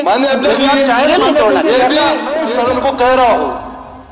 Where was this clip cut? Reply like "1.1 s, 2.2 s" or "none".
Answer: 2.4 s